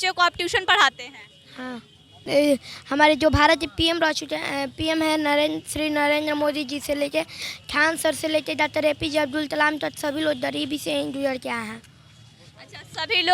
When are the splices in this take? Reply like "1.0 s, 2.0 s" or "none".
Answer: 2.2 s